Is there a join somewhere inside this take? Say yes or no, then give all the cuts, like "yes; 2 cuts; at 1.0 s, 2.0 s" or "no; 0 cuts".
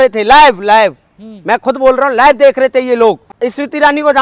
yes; 1 cut; at 3.3 s